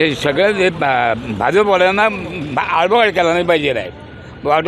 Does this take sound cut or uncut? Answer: uncut